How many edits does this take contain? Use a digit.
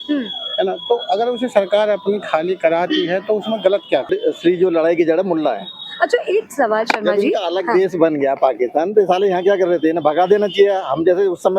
1